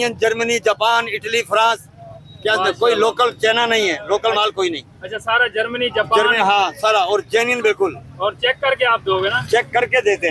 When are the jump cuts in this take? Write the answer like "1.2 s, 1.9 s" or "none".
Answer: none